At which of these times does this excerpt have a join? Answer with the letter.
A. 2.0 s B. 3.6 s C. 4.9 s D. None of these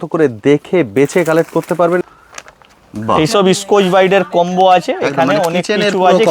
A